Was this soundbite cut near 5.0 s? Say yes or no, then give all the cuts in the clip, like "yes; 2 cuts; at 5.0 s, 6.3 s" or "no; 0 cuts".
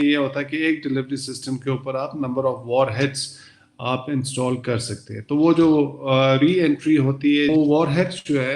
no; 1 cut; at 7.5 s